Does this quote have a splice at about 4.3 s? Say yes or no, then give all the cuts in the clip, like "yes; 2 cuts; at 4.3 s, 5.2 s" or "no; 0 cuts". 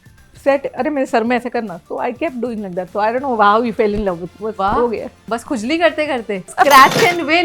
yes; 2 cuts; at 4.3 s, 6.5 s